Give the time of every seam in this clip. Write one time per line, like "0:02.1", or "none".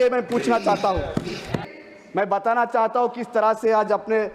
0:01.7